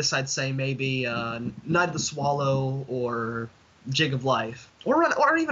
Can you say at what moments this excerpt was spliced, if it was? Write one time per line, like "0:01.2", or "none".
0:04.6